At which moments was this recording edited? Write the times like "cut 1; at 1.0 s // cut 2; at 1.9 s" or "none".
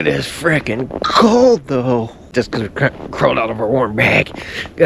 cut 1; at 2.3 s